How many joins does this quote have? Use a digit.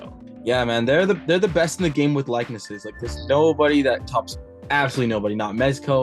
1